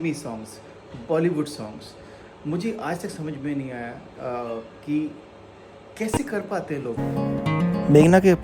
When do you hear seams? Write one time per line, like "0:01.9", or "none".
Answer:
0:07.0